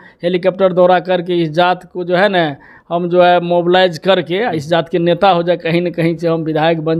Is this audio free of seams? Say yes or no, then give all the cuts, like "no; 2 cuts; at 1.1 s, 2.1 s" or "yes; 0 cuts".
yes; 0 cuts